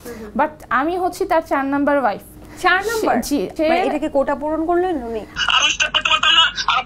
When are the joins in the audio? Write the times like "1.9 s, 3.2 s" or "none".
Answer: 3.5 s, 5.3 s